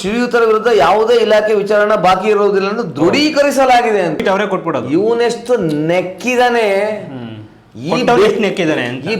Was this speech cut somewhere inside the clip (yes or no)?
yes